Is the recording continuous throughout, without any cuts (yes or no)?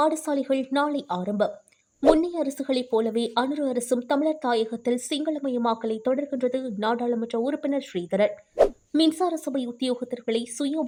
yes